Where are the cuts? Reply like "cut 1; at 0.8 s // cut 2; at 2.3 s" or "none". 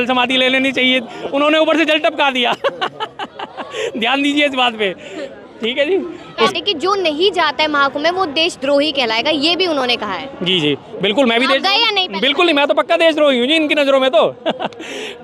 cut 1; at 6.5 s